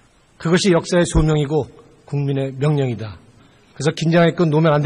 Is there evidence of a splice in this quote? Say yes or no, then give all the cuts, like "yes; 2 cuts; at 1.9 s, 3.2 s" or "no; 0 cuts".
yes; 1 cut; at 2.2 s